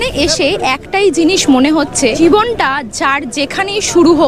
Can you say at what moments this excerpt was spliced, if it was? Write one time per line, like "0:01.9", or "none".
0:02.1